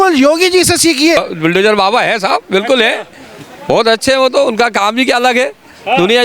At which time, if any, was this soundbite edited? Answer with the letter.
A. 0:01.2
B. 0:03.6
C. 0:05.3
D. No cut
A